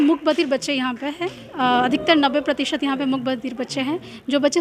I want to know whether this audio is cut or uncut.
uncut